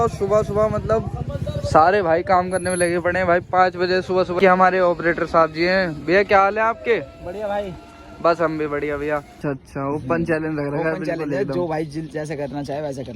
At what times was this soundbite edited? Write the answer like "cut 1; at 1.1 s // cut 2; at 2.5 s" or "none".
cut 1; at 4.3 s // cut 2; at 9.4 s